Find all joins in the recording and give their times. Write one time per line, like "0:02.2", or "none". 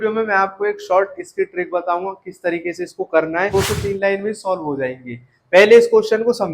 0:03.5